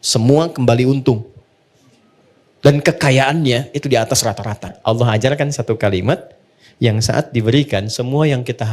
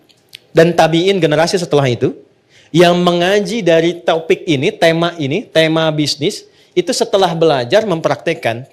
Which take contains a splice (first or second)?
first